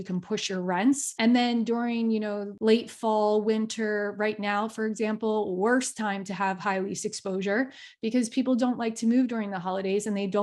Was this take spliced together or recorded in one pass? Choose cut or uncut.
cut